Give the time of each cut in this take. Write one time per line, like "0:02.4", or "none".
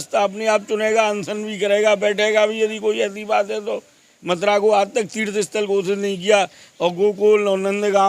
0:04.1